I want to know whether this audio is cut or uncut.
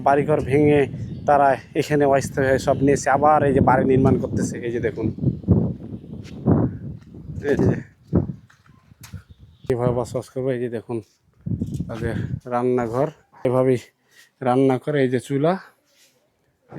cut